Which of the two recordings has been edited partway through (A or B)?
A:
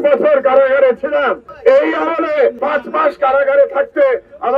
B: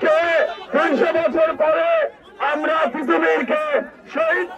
A